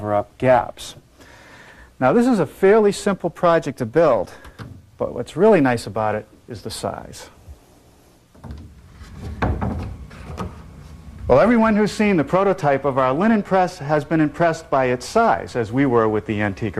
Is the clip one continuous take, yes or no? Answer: yes